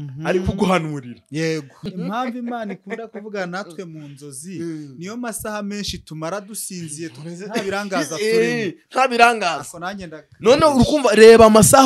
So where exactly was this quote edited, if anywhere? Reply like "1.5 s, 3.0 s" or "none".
1.8 s